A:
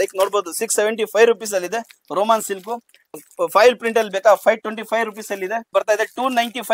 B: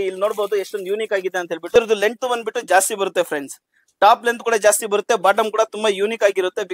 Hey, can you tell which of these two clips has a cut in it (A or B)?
A